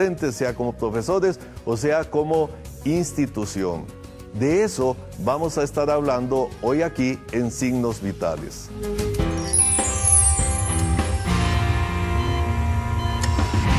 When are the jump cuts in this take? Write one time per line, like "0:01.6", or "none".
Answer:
0:01.0